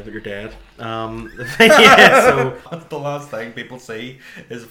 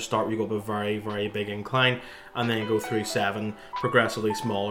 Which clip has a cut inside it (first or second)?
first